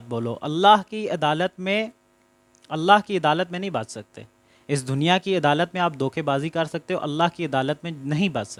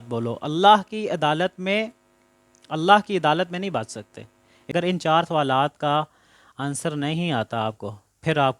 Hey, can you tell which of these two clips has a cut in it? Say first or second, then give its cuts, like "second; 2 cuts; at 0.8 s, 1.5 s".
second; 1 cut; at 4.5 s